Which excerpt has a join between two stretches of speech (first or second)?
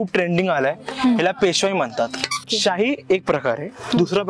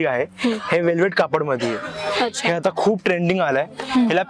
first